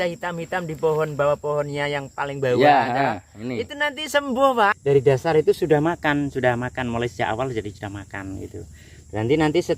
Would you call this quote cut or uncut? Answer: cut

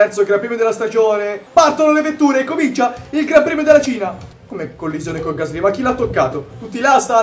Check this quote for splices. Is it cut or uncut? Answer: cut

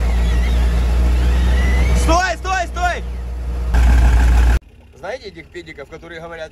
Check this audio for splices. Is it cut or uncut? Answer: cut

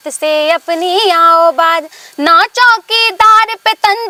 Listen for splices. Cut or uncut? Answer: uncut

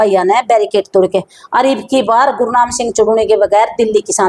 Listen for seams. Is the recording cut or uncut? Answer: uncut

